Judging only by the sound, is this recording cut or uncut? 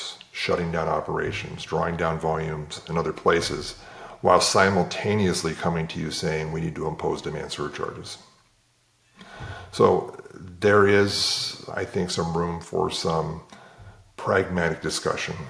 uncut